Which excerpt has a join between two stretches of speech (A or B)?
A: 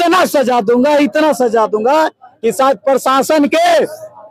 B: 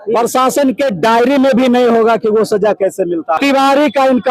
B